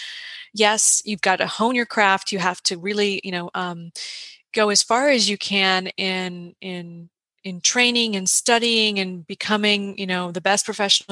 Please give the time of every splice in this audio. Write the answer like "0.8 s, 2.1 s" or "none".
none